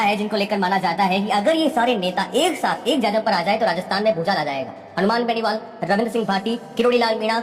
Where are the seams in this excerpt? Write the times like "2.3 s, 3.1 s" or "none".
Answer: none